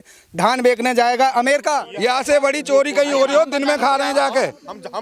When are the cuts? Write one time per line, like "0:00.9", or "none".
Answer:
0:01.9

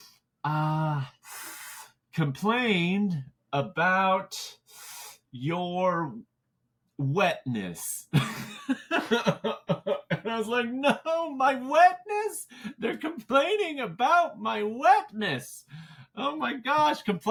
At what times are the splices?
none

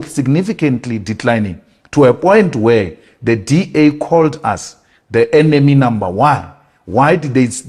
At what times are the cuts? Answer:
none

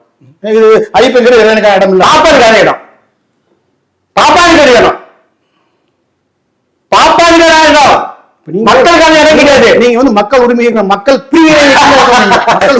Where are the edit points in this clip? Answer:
none

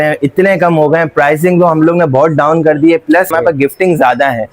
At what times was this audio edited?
0:03.3

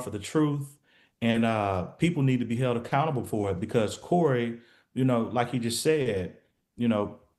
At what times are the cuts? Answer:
none

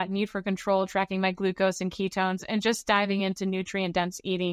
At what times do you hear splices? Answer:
none

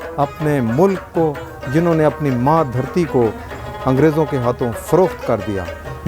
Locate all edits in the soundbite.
none

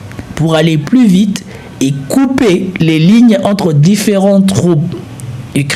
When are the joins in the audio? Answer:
none

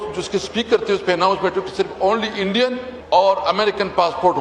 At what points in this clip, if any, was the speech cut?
0:02.9

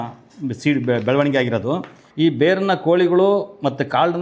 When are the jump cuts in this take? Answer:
0:02.0

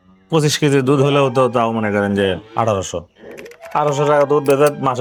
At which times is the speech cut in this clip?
none

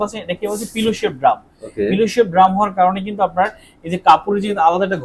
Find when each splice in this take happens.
none

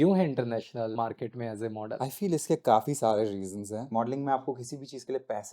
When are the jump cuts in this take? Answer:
0:00.9
0:02.0
0:03.9

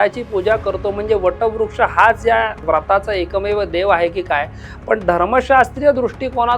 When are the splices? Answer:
0:02.6

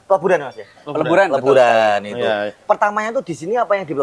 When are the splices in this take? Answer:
none

